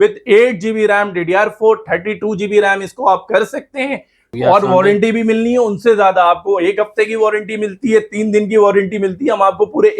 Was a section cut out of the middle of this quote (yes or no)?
yes